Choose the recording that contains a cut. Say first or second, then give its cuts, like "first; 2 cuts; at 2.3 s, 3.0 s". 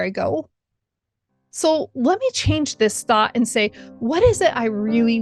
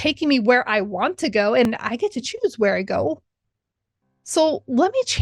second; 1 cut; at 1.7 s